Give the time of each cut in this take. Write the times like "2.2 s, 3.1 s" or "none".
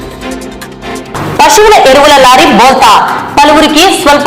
1.1 s